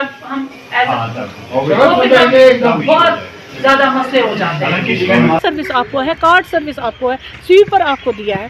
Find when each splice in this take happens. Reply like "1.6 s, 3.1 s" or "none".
5.4 s